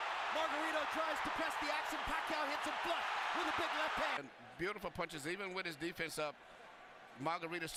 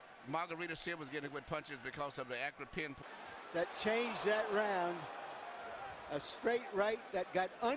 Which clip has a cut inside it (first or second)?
second